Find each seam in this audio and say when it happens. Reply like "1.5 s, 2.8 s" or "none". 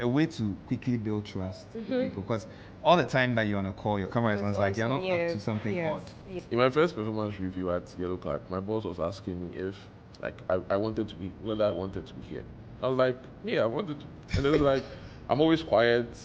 6.3 s